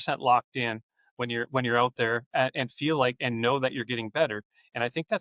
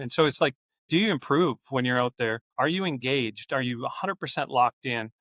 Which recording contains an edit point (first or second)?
second